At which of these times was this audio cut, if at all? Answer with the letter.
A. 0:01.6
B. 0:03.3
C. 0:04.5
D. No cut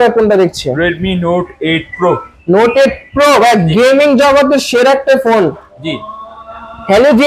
D